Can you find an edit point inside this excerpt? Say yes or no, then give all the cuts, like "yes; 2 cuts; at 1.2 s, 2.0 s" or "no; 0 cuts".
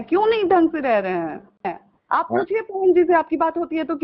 yes; 1 cut; at 1.7 s